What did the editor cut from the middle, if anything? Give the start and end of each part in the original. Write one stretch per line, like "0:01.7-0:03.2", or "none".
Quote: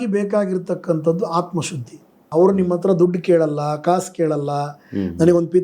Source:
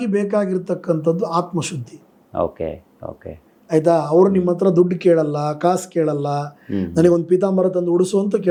0:02.3-0:04.1